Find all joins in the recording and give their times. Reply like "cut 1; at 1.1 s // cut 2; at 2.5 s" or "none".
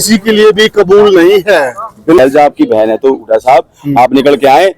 cut 1; at 2.2 s